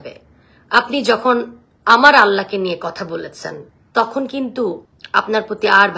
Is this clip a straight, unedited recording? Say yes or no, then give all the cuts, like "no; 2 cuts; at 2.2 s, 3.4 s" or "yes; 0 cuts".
yes; 0 cuts